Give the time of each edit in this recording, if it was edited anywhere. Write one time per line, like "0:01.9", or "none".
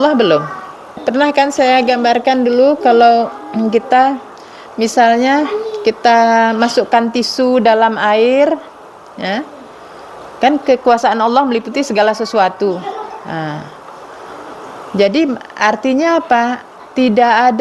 0:01.0